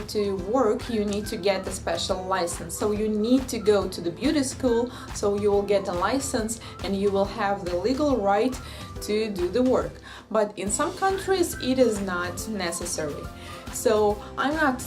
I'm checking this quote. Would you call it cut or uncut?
cut